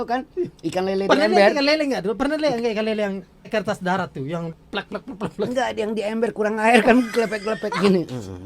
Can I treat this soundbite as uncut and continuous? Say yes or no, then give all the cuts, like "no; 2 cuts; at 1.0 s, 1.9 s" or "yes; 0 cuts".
no; 2 cuts; at 3.5 s, 4.5 s